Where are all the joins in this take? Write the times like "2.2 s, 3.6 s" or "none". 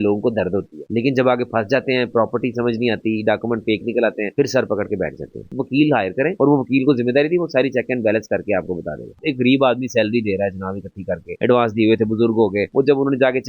5.5 s, 9.2 s